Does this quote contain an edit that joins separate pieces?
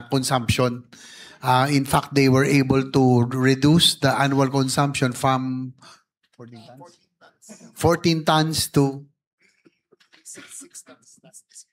no; 0 cuts

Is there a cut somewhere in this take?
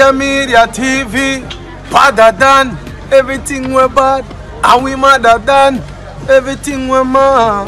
no; 0 cuts

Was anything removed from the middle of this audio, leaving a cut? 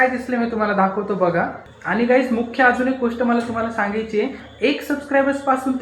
yes; 2 cuts; at 1.6 s, 4.4 s

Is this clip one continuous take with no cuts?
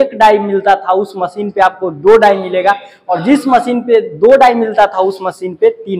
yes; 0 cuts

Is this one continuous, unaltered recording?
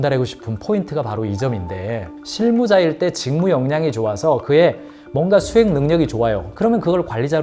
yes; 0 cuts

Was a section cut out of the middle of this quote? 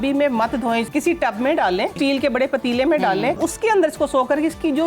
yes; 3 cuts; at 0.9 s, 1.9 s, 3.4 s

